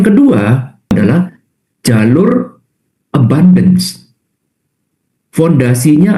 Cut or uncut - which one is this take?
cut